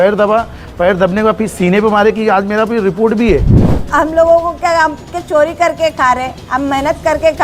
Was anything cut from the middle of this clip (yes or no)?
yes